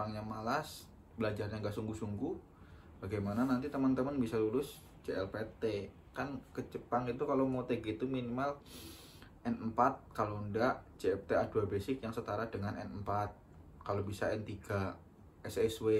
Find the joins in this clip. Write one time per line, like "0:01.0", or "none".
none